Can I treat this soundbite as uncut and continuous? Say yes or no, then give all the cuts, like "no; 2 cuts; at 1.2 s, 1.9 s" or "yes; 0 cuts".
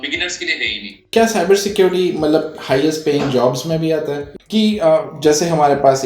no; 2 cuts; at 1.1 s, 4.3 s